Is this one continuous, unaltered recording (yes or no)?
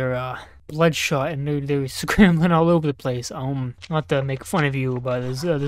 yes